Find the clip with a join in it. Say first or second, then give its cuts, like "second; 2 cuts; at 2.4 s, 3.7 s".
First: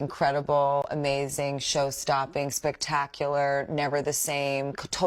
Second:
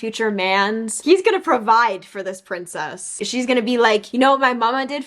second; 2 cuts; at 0.9 s, 3.2 s